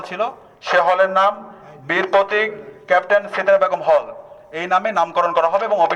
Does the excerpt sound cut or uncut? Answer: uncut